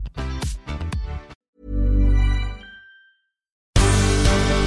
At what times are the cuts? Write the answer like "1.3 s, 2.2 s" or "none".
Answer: 3.6 s